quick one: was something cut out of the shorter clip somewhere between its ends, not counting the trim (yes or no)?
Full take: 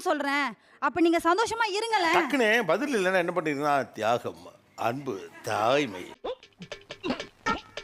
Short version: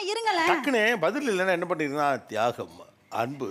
no